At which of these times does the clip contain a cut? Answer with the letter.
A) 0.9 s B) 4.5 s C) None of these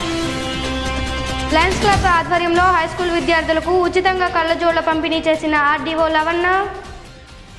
A